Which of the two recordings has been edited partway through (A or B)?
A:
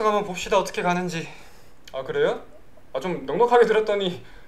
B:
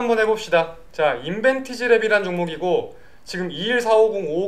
A